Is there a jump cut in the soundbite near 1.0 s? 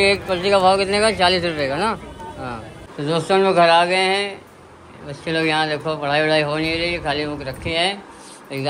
no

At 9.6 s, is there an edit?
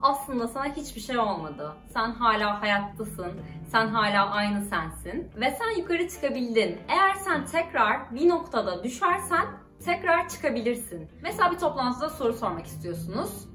no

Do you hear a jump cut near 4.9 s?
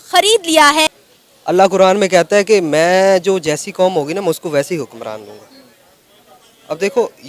no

